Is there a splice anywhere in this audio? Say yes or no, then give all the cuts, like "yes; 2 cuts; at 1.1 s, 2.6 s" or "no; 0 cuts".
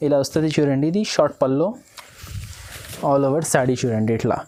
no; 0 cuts